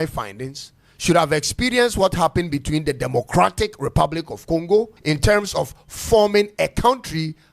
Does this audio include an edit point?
yes; 1 cut; at 4.9 s

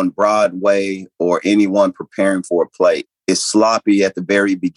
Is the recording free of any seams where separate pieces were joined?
no; 1 cut; at 3.1 s

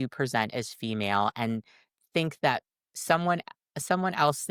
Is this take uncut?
yes; 0 cuts

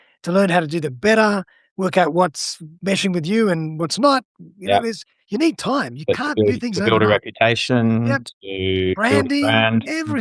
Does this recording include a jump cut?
no; 0 cuts

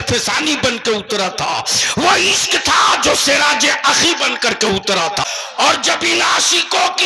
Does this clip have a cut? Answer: yes; 1 cut; at 5.2 s

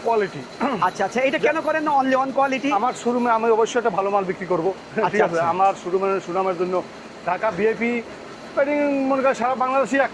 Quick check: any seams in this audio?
no; 0 cuts

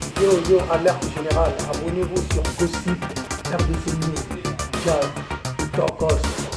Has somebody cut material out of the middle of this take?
no; 0 cuts

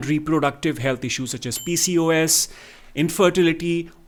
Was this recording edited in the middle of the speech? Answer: no; 0 cuts

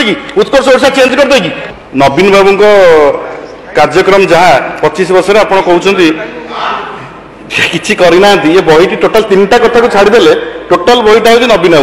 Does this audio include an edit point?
yes; 1 cut; at 1.6 s

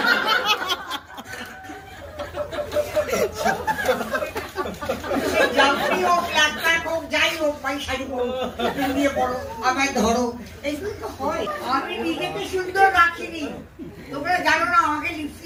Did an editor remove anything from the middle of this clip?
no; 0 cuts

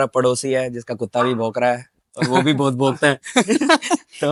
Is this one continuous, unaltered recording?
yes; 0 cuts

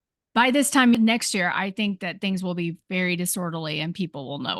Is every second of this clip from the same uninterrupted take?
no; 1 cut; at 0.9 s

